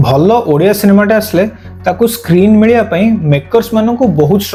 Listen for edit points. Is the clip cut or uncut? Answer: uncut